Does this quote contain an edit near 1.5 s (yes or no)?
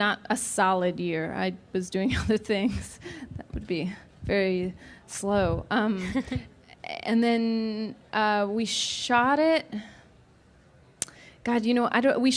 no